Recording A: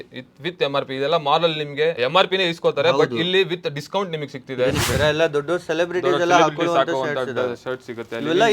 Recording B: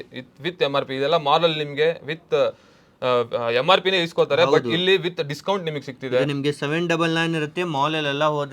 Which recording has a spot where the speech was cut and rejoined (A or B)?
A